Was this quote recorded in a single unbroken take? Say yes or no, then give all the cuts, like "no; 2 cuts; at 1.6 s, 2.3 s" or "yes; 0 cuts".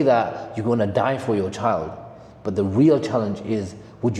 yes; 0 cuts